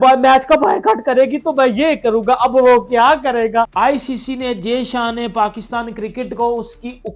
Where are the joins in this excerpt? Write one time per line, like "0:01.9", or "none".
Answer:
0:03.7